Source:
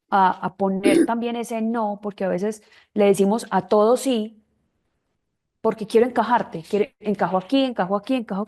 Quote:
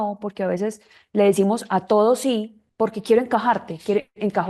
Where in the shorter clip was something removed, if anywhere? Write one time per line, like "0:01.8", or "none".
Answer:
0:02.6

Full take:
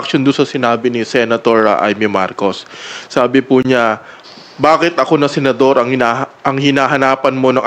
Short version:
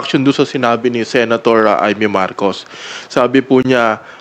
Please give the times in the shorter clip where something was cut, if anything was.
none

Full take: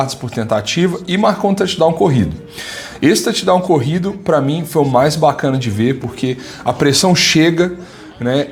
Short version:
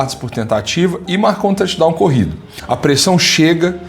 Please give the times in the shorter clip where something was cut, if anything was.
0:02.5

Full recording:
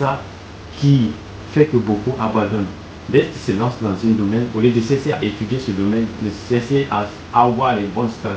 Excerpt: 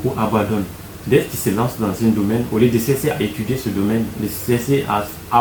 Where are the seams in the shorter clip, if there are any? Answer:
none

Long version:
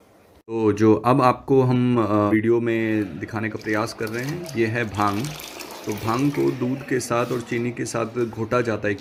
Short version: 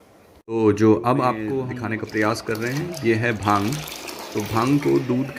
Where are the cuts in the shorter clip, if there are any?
0:01.5

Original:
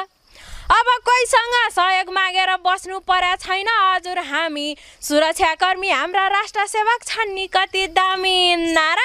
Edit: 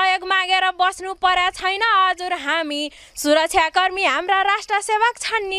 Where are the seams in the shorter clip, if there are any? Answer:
none

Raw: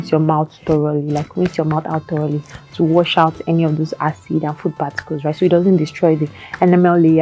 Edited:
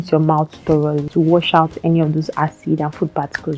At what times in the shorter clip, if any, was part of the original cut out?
0:01.0

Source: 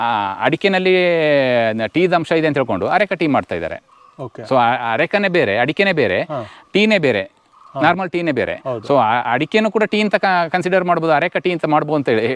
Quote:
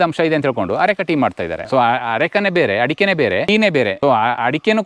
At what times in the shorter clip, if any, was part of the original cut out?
0:01.6
0:03.8

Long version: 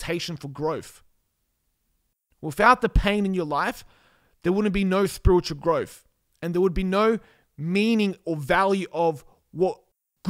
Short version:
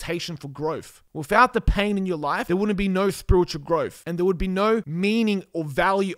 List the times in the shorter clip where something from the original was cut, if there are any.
0:01.0
0:02.4
0:04.0
0:04.9

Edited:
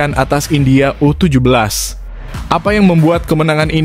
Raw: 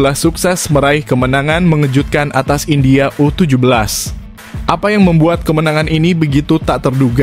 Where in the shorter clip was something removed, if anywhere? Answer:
none

